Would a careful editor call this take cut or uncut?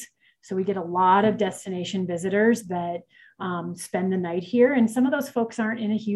uncut